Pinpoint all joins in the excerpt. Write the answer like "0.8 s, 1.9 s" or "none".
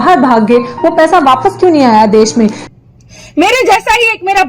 2.6 s